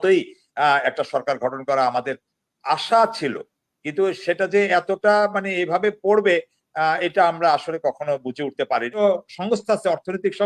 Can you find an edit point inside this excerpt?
yes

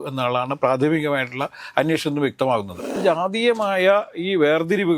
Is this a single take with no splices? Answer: no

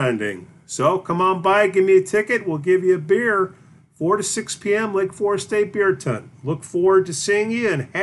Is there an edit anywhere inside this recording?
no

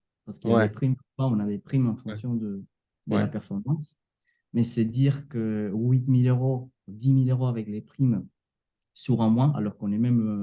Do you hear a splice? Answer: no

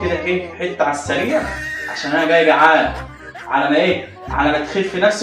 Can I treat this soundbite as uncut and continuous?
yes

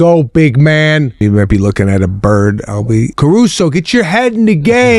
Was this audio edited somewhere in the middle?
yes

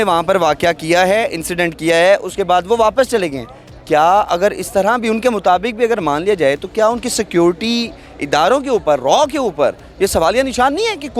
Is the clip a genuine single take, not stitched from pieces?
yes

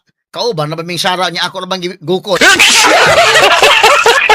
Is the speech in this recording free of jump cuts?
no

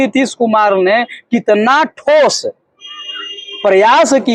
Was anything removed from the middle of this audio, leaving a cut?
no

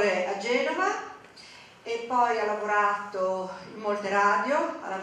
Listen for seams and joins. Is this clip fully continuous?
yes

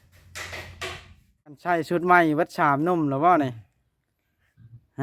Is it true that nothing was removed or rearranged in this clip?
no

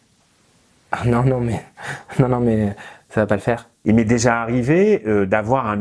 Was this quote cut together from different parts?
yes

